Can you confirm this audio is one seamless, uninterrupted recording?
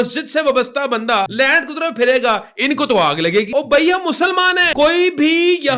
no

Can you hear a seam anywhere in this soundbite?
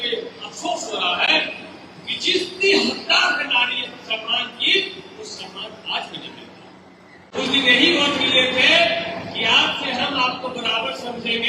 yes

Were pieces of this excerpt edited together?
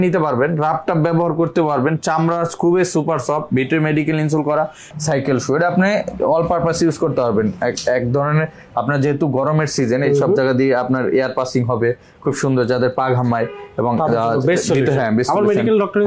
yes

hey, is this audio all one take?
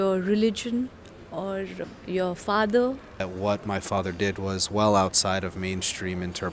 no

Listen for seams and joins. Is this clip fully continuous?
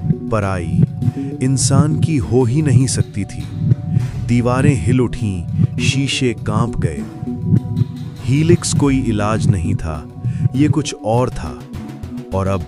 yes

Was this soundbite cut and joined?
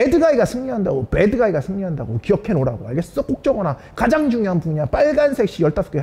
no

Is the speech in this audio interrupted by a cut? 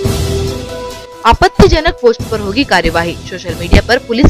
no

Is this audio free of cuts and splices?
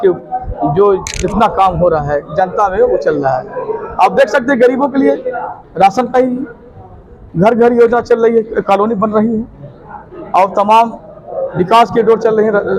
yes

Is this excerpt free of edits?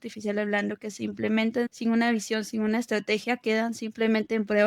no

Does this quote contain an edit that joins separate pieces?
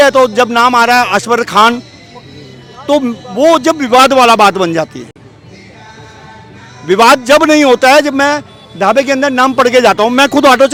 no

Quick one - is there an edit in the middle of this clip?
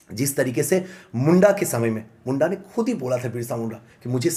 no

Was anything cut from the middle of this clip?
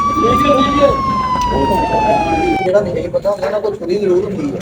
yes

